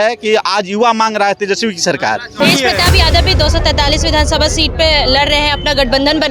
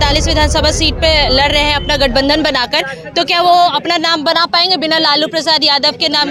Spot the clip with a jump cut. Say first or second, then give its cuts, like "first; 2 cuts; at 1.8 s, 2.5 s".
first; 1 cut; at 2.4 s